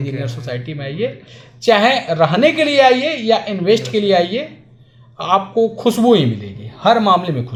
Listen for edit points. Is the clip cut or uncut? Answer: uncut